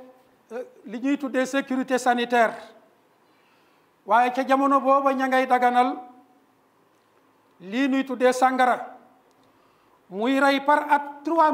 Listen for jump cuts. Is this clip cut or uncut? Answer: uncut